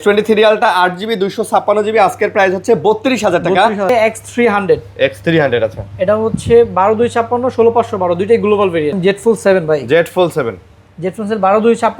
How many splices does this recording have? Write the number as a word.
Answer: two